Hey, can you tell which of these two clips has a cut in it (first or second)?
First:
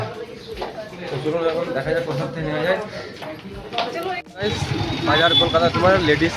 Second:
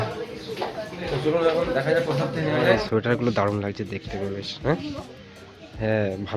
second